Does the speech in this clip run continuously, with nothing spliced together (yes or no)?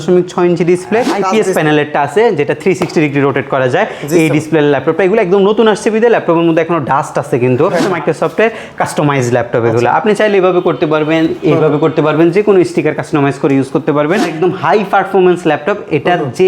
no